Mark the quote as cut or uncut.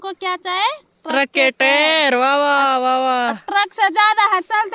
uncut